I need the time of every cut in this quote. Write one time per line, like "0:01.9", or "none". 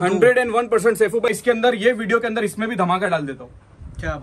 0:01.3

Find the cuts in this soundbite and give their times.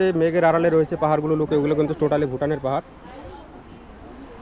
none

